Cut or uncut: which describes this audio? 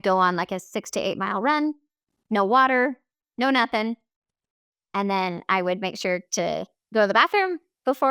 uncut